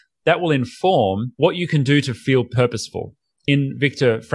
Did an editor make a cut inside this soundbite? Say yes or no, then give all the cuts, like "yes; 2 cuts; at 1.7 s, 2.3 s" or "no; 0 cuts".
yes; 1 cut; at 1.3 s